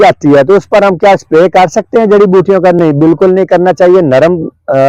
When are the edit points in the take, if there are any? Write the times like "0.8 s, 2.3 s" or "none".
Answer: none